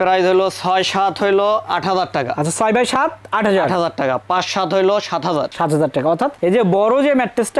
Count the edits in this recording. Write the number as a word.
zero